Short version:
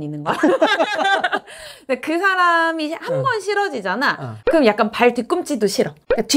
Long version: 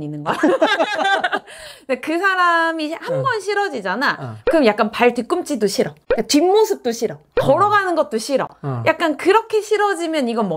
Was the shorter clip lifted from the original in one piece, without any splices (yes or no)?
yes